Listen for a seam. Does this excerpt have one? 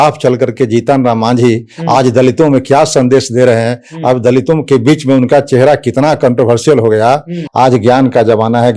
yes; 1 cut; at 7.4 s

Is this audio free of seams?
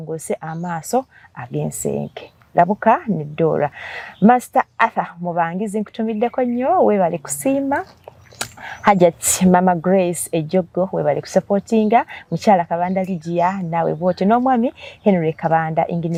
yes; 0 cuts

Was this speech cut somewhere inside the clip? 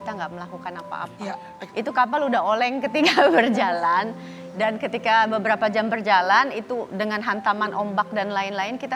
yes; 1 cut; at 1.6 s

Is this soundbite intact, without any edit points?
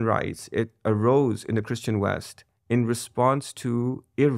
yes; 0 cuts

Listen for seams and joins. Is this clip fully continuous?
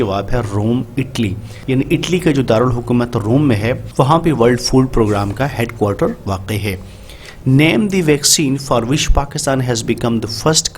no; 2 cuts; at 1.5 s, 3.8 s

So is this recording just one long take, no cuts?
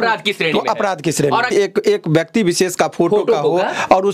no; 1 cut; at 1.5 s

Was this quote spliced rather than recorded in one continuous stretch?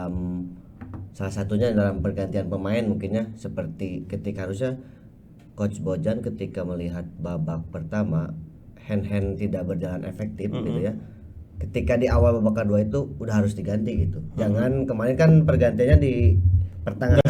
no; 0 cuts

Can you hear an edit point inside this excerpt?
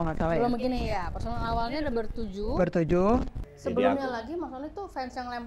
yes; 1 cut; at 3.4 s

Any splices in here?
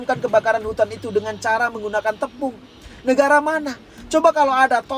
no; 0 cuts

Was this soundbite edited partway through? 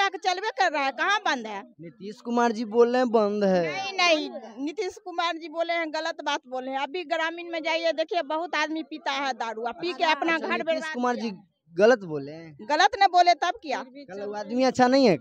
no; 0 cuts

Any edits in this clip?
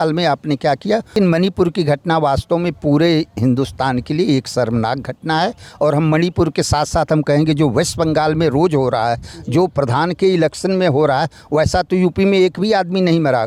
no; 0 cuts

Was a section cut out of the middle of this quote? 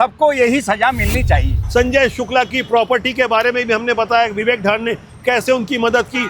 yes; 1 cut; at 1.6 s

